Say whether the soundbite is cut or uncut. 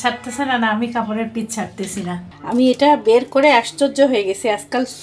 cut